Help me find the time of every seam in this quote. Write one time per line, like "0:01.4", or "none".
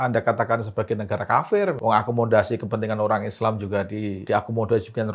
0:01.8
0:04.2